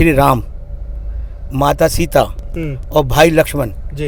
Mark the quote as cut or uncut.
uncut